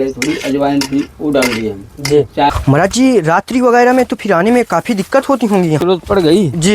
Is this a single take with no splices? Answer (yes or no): no